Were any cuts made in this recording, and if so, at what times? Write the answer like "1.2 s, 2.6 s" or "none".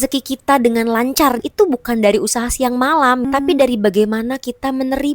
1.4 s, 3.2 s